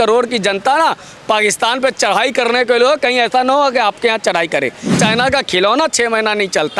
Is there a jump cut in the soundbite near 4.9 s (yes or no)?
yes